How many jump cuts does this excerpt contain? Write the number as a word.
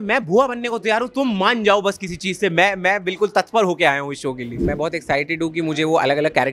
one